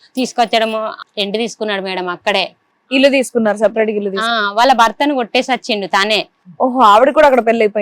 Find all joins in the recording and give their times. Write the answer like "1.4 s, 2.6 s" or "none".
1.0 s

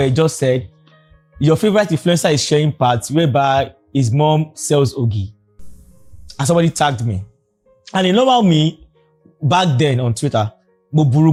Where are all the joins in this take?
none

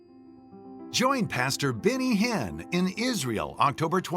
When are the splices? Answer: 1.0 s

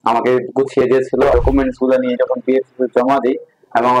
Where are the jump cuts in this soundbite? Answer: 1.3 s

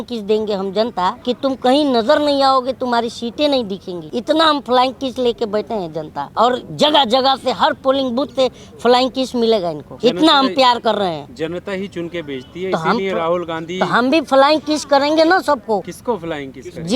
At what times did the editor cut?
1.2 s, 4.0 s, 6.2 s, 9.9 s, 15.9 s

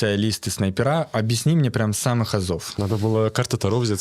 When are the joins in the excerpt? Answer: 2.7 s

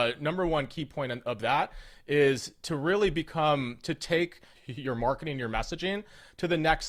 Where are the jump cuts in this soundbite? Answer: none

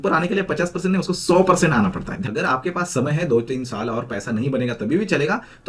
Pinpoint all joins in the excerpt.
2.1 s

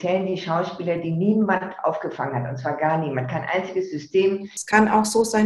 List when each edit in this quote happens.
4.5 s

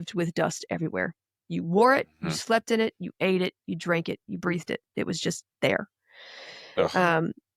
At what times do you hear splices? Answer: none

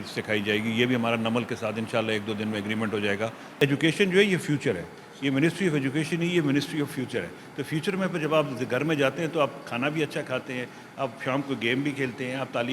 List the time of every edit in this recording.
3.6 s

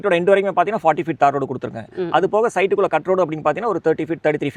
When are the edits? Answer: none

